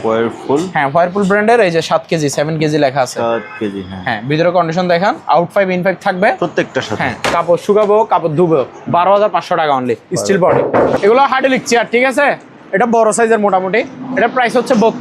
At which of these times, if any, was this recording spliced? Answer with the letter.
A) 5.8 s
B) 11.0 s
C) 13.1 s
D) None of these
B